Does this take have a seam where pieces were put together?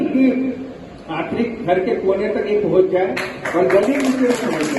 no; 0 cuts

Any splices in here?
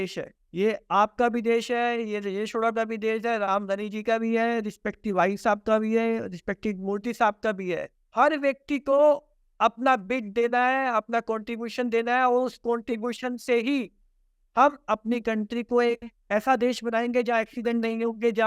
no; 0 cuts

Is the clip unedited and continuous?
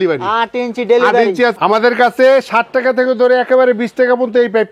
no; 1 cut; at 1.5 s

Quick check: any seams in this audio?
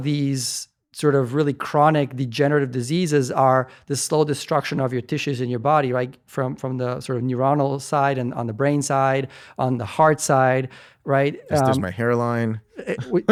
no; 0 cuts

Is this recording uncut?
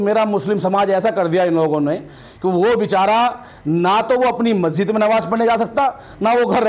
yes; 0 cuts

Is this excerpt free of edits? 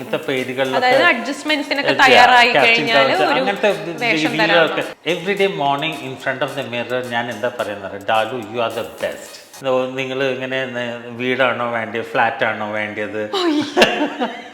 no; 2 cuts; at 4.9 s, 9.5 s

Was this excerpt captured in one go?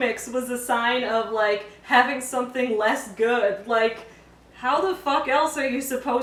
yes; 0 cuts

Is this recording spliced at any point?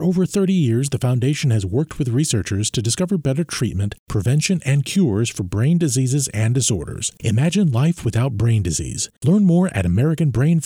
no; 0 cuts

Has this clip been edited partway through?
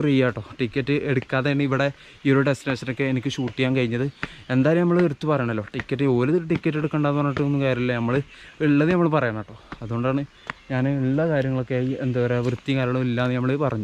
no; 0 cuts

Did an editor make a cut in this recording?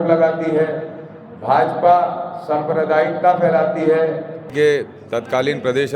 yes; 1 cut; at 4.5 s

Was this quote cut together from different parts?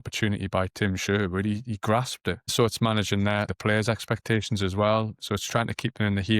yes; 2 cuts; at 2.5 s, 3.5 s

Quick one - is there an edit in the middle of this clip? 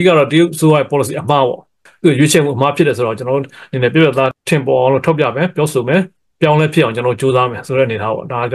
no; 0 cuts

